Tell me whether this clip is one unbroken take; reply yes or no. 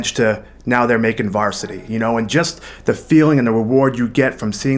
yes